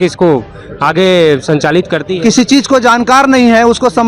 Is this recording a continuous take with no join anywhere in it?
no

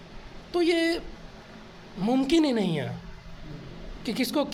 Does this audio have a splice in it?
no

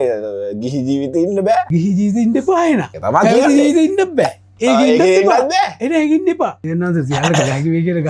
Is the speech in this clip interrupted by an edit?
yes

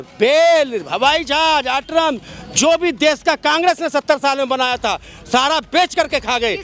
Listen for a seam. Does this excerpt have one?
no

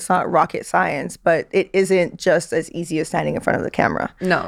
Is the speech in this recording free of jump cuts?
yes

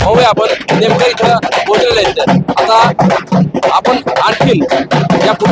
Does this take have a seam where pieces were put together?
no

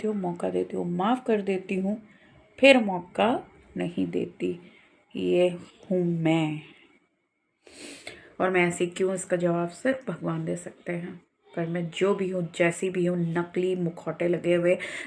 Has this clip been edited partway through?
no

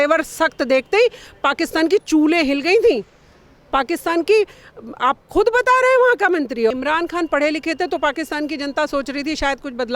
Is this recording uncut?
no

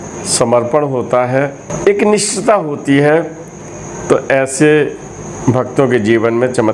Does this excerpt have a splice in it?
yes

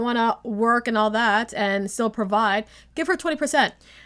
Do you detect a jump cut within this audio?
no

